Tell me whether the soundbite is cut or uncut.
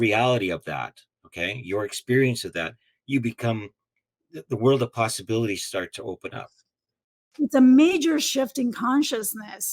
cut